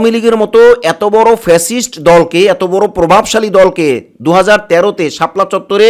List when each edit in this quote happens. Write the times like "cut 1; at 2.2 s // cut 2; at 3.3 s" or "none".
none